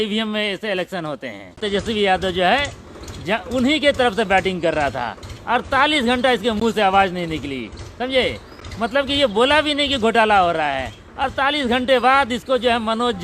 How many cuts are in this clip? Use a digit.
1